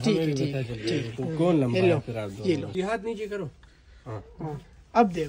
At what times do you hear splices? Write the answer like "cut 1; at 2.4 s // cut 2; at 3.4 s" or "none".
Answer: cut 1; at 2.7 s